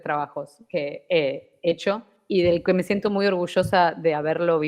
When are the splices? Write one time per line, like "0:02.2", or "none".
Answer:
0:01.8